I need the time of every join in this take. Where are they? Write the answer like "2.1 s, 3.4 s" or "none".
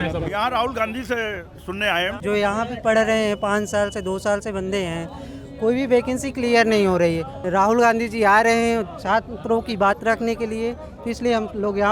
2.2 s, 7.3 s